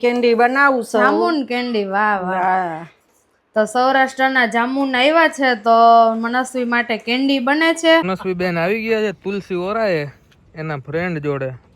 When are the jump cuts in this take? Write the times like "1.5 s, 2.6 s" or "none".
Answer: 8.1 s